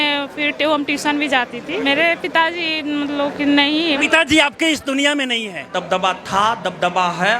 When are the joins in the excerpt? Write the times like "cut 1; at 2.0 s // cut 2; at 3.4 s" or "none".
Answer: cut 1; at 1.8 s // cut 2; at 4.0 s // cut 3; at 5.7 s